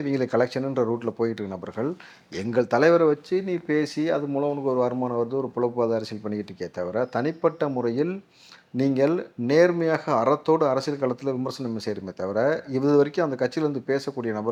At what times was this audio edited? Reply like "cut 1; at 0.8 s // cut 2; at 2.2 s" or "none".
none